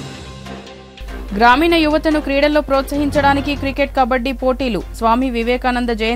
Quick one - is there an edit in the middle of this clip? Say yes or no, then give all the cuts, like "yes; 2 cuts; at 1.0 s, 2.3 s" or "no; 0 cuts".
yes; 1 cut; at 1.2 s